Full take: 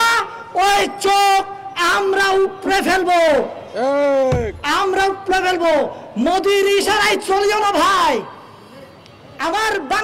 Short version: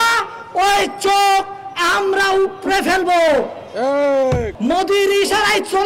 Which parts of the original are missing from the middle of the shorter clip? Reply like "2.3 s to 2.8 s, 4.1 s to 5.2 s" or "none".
4.5 s to 6.1 s